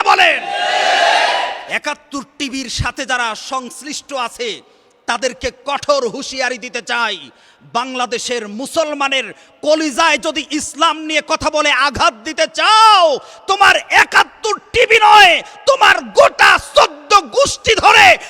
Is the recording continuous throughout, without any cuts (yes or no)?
no